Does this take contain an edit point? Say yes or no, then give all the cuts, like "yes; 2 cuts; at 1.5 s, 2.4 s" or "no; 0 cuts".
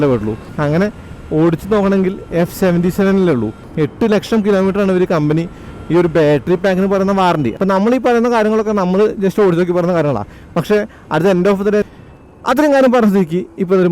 yes; 3 cuts; at 3.6 s, 7.5 s, 11.8 s